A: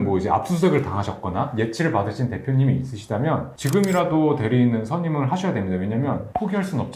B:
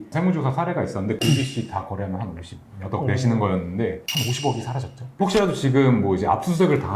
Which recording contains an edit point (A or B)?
B